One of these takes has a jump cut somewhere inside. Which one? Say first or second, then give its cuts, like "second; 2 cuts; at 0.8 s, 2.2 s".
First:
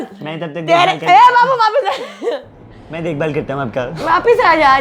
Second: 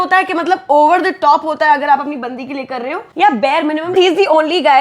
second; 2 cuts; at 3.0 s, 3.9 s